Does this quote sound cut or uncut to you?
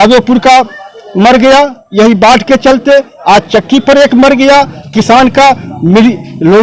uncut